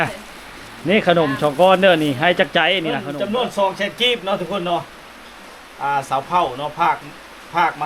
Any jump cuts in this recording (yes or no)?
yes